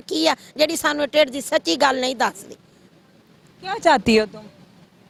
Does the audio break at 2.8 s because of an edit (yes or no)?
no